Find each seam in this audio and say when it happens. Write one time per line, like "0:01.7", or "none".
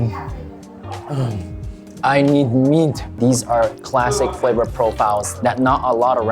0:03.2